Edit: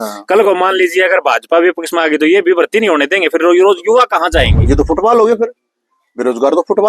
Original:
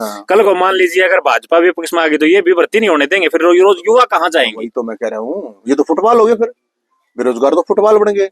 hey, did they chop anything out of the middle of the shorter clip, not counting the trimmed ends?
yes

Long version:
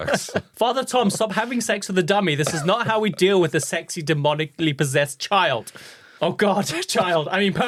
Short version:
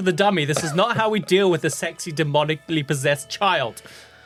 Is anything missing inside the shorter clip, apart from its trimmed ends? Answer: no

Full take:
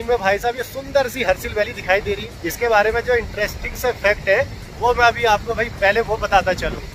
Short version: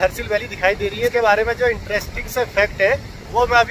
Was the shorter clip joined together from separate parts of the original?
yes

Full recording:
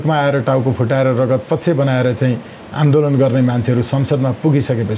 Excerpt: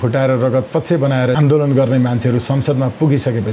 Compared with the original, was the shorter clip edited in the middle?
yes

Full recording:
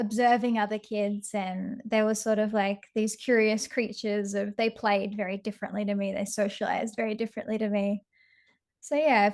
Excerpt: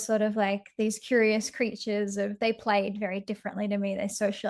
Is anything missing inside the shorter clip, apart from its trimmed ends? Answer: no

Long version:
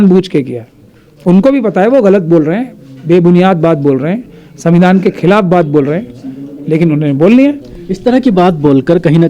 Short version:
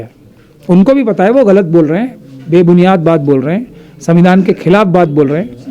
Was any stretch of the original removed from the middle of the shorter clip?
no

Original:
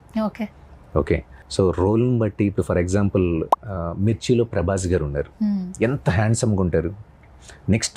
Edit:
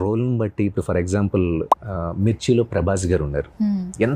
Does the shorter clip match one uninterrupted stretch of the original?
yes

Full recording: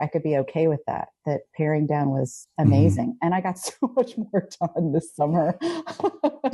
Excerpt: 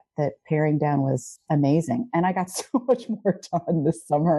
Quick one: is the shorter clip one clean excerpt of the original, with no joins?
yes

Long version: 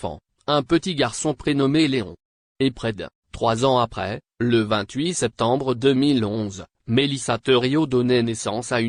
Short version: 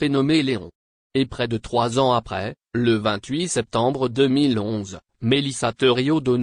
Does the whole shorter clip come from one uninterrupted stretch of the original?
no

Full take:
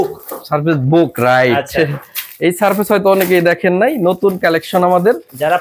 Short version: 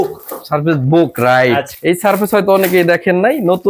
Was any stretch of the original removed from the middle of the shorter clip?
yes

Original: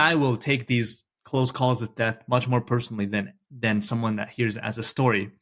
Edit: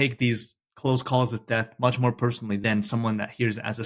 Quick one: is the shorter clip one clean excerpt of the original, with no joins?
no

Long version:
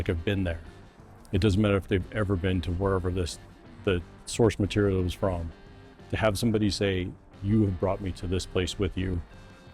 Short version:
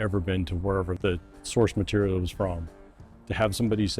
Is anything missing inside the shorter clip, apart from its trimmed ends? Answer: yes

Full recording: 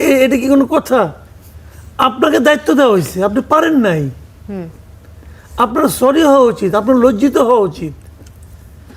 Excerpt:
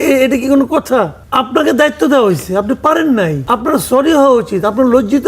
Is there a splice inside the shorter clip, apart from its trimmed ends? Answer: yes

